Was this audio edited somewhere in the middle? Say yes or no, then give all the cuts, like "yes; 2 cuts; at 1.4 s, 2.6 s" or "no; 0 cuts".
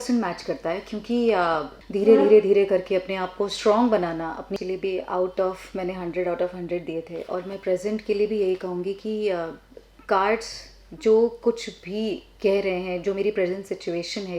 yes; 2 cuts; at 1.8 s, 4.5 s